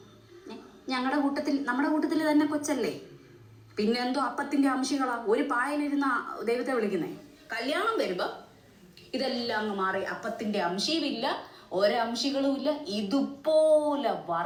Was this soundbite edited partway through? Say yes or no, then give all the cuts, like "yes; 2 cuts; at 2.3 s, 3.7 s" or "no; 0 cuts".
no; 0 cuts